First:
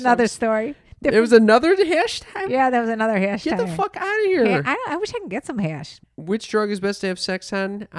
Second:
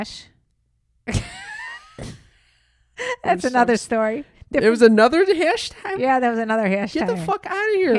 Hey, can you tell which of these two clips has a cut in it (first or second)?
first